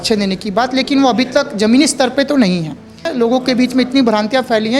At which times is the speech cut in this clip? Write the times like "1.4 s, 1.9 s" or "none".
3.1 s